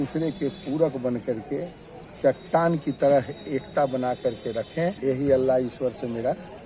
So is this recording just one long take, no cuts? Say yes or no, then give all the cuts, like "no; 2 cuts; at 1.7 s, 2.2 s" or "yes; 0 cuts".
no; 1 cut; at 5.0 s